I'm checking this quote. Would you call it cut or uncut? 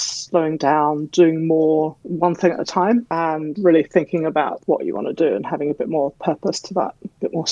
cut